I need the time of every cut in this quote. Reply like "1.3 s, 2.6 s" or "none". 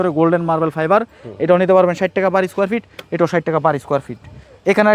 none